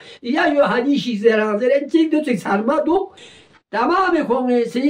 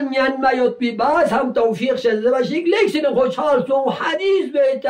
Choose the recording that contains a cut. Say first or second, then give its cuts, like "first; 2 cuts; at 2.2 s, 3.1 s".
first; 1 cut; at 3.2 s